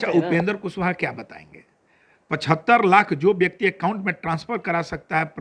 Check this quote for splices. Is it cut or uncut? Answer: uncut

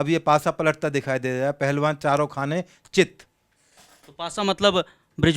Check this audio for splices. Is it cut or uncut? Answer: uncut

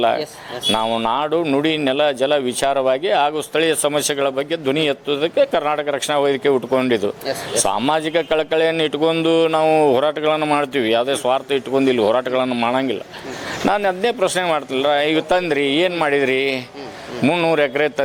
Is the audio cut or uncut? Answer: uncut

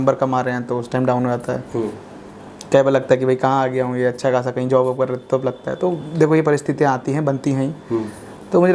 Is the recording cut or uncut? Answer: uncut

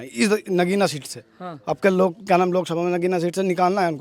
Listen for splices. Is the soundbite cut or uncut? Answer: uncut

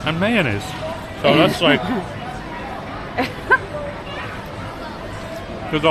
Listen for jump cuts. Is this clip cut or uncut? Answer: uncut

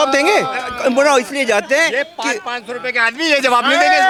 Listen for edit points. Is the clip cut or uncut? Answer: uncut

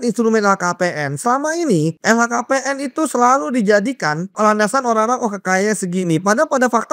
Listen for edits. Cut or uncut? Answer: cut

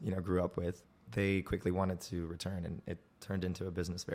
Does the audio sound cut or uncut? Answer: cut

